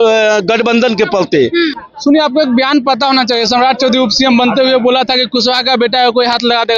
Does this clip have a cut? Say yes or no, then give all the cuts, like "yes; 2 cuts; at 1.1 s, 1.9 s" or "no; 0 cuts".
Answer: yes; 1 cut; at 1.8 s